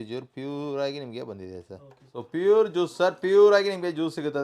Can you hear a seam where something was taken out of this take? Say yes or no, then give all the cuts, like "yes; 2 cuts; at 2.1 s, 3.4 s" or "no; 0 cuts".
yes; 1 cut; at 2.1 s